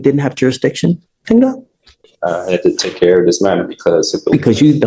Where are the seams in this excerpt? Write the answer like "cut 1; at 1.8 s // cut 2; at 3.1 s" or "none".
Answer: none